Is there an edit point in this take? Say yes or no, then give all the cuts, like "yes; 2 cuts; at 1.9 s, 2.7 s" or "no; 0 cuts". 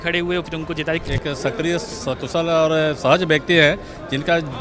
yes; 1 cut; at 1.0 s